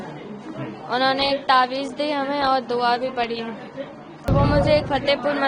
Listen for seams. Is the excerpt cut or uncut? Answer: cut